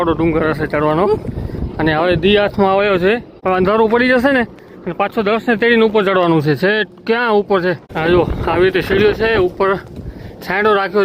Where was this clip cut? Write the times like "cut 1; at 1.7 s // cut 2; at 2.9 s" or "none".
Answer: cut 1; at 3.3 s // cut 2; at 7.9 s